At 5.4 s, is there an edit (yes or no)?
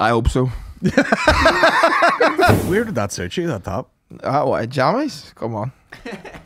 no